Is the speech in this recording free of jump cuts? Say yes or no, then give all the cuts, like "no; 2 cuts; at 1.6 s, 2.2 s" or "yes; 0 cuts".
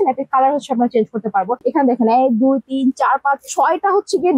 yes; 0 cuts